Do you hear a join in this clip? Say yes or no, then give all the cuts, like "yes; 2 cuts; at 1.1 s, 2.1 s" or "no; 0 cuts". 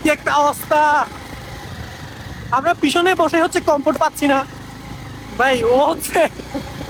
no; 0 cuts